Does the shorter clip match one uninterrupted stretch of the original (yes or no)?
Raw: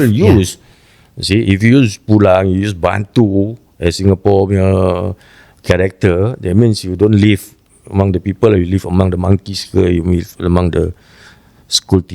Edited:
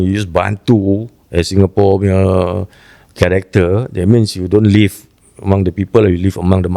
yes